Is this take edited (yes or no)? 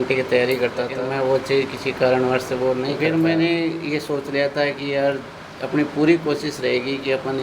yes